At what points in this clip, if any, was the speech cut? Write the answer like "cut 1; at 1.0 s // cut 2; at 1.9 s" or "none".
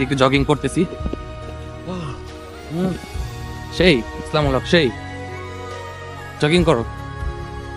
none